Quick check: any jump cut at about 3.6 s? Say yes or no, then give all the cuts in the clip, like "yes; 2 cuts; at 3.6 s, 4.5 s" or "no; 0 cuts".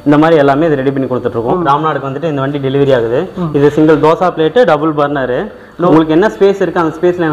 no; 2 cuts; at 1.5 s, 5.9 s